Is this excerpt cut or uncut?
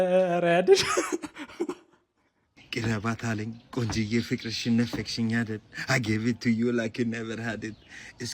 cut